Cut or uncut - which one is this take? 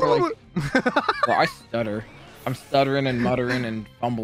uncut